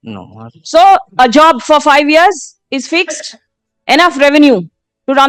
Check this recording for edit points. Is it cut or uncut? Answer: uncut